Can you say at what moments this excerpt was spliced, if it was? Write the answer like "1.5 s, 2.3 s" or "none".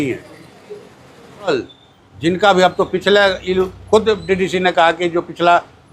1.5 s